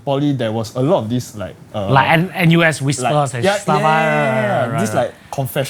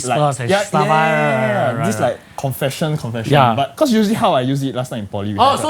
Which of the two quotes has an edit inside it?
second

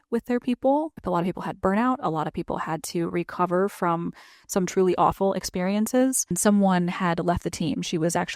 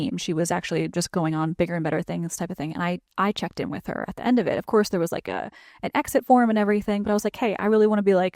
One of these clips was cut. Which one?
first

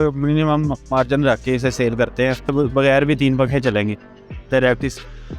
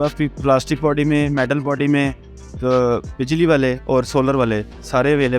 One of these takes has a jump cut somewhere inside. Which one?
first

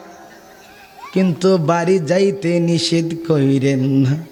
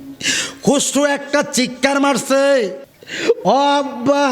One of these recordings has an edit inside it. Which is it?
second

